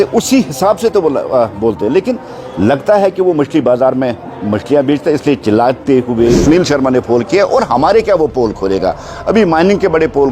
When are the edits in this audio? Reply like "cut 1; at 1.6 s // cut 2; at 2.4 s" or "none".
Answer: cut 1; at 6.4 s